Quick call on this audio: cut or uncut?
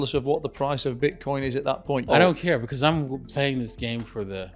cut